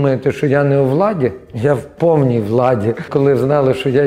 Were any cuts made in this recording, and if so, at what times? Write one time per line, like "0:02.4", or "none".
0:03.1